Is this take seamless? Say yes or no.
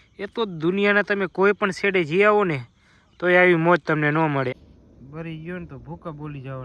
no